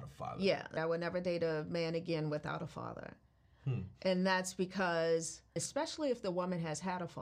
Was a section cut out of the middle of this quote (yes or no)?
yes